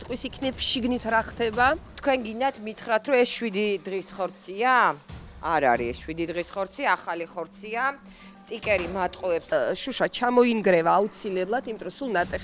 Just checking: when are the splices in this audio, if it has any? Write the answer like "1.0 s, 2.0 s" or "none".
1.9 s, 9.5 s